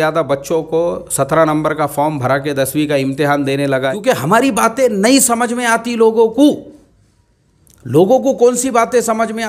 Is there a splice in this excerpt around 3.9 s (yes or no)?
yes